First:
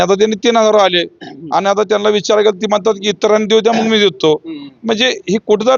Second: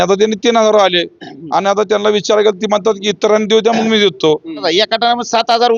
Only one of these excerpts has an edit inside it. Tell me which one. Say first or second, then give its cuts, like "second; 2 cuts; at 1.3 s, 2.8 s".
second; 1 cut; at 4.6 s